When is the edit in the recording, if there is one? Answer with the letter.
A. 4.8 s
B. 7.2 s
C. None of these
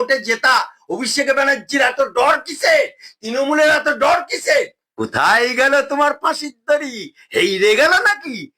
A